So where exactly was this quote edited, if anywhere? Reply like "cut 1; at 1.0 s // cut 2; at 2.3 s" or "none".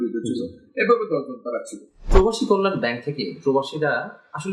cut 1; at 1.9 s